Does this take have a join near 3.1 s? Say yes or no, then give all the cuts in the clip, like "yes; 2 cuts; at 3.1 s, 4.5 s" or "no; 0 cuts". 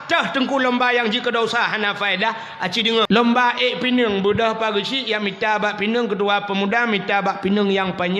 yes; 1 cut; at 3.1 s